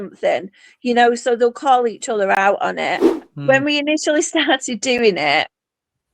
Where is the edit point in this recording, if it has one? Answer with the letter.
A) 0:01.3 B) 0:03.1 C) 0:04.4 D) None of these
B